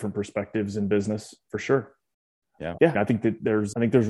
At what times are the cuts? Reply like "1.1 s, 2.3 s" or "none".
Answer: none